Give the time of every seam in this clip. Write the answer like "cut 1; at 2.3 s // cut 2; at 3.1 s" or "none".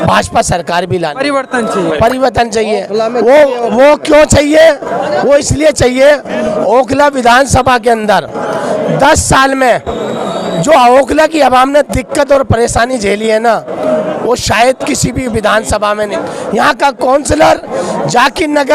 cut 1; at 16.1 s